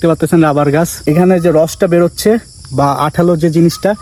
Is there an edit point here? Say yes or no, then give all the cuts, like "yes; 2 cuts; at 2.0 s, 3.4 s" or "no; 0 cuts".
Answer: no; 0 cuts